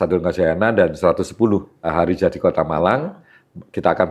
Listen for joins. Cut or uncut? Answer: cut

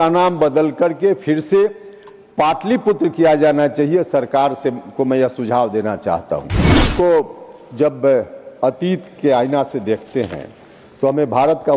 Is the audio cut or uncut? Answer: cut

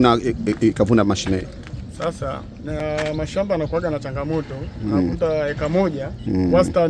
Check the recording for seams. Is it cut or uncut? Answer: uncut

